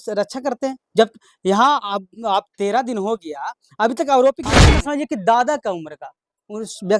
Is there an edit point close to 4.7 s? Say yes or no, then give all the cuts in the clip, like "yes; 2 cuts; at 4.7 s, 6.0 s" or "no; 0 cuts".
yes; 1 cut; at 4.7 s